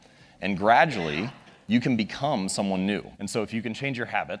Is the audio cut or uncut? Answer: cut